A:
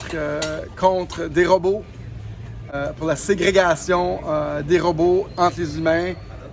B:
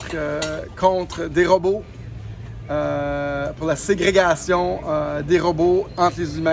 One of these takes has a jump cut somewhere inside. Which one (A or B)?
A